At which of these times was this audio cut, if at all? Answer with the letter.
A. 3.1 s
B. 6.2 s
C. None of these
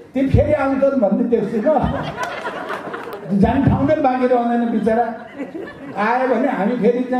A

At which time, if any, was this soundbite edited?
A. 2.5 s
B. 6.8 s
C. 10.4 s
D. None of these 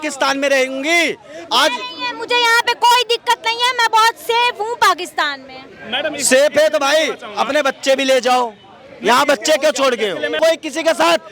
C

